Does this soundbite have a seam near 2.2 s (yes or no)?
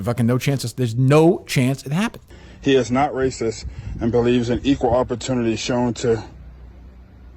yes